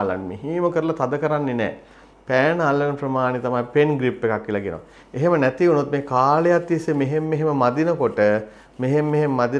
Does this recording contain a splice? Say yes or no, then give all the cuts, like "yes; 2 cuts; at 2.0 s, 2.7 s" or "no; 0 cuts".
no; 0 cuts